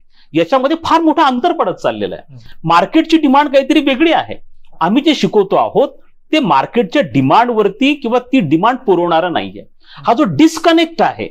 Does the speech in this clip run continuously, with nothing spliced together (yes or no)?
yes